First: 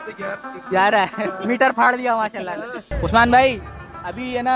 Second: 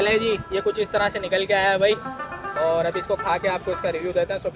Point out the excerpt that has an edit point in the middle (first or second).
first